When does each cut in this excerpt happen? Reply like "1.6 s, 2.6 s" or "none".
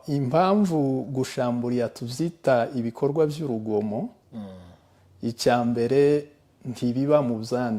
none